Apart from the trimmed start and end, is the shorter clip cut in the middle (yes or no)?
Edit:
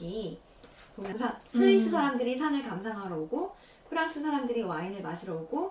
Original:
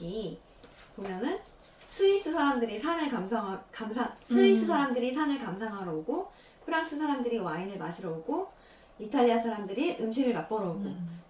yes